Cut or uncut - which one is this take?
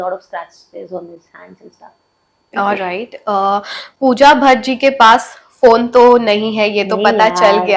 uncut